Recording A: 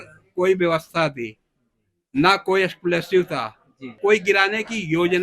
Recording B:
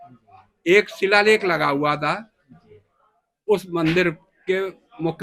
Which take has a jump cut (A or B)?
A